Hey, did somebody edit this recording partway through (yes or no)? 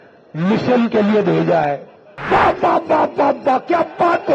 yes